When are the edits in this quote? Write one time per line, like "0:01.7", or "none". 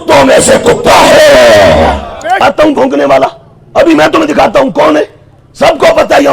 0:02.4